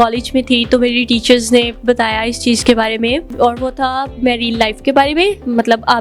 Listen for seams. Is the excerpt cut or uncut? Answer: cut